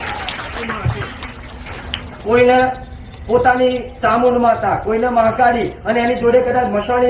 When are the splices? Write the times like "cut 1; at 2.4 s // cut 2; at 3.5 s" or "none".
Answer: cut 1; at 1.9 s